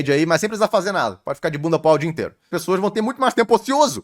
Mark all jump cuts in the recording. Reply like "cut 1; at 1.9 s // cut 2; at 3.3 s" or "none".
cut 1; at 2.5 s

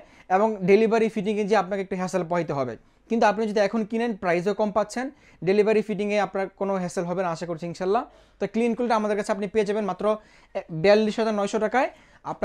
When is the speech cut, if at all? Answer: none

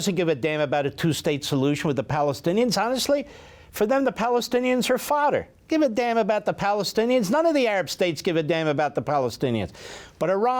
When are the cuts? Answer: none

